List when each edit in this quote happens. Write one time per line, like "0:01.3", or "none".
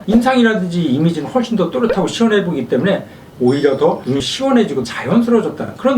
none